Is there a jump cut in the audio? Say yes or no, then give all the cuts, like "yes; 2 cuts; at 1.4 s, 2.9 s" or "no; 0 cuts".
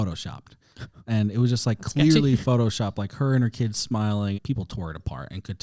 yes; 1 cut; at 4.4 s